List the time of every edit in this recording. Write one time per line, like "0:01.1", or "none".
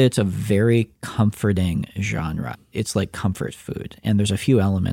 0:02.7